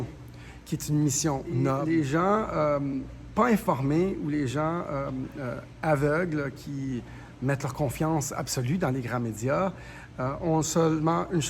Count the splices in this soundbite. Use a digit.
1